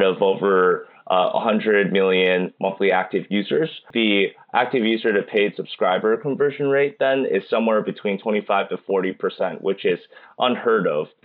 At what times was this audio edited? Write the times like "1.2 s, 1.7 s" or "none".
3.8 s